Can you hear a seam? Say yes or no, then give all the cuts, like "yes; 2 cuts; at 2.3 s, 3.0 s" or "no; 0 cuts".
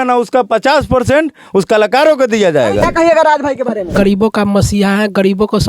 yes; 2 cuts; at 2.9 s, 3.9 s